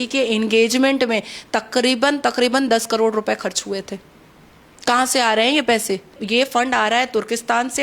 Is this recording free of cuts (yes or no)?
no